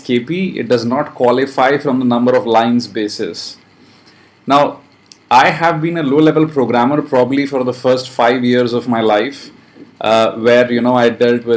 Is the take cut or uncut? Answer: cut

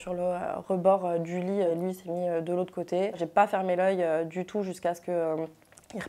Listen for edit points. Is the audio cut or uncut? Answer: cut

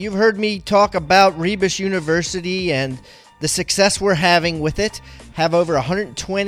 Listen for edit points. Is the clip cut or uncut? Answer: uncut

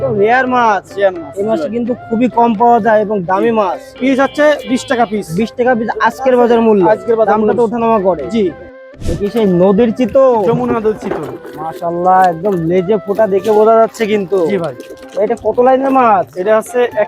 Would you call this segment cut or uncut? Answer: cut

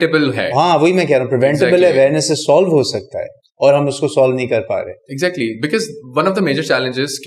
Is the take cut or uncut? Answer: uncut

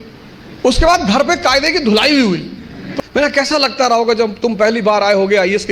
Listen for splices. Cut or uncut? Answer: cut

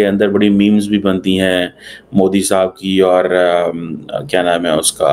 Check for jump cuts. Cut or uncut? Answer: uncut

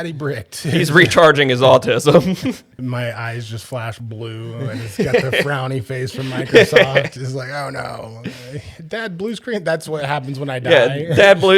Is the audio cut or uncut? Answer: cut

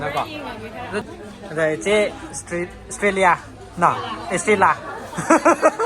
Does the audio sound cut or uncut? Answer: cut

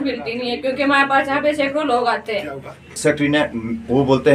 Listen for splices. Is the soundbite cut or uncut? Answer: cut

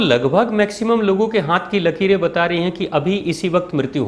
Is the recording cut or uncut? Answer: uncut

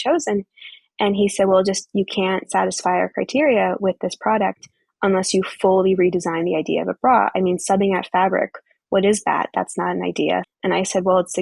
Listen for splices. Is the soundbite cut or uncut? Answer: cut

